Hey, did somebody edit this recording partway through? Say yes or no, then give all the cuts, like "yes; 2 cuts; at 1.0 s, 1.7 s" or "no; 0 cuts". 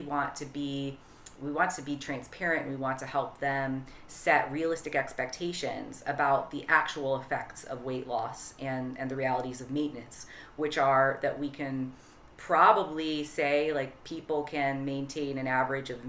no; 0 cuts